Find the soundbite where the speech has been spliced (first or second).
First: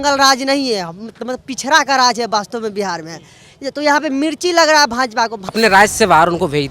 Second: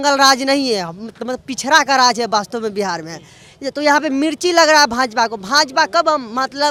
first